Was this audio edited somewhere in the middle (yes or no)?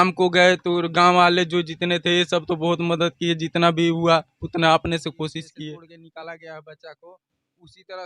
yes